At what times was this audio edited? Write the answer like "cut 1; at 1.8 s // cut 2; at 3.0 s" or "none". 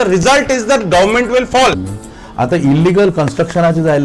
cut 1; at 1.9 s